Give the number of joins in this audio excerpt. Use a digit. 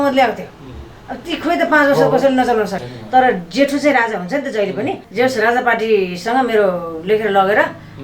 2